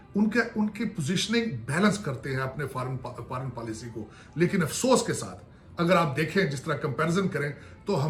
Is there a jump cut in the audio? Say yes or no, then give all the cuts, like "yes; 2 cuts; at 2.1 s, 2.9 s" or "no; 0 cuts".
no; 0 cuts